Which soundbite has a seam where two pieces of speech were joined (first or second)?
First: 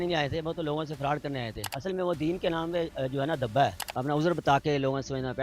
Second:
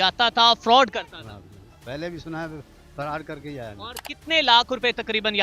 first